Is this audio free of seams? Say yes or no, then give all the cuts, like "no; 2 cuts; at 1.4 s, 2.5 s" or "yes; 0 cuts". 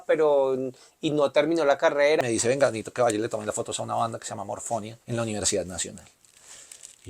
no; 2 cuts; at 2.2 s, 5.0 s